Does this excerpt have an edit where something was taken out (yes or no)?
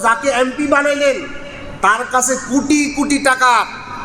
no